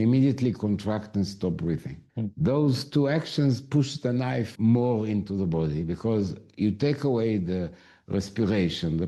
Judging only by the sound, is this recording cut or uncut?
uncut